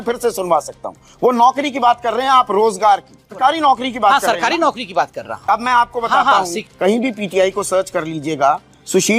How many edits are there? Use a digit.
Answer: 2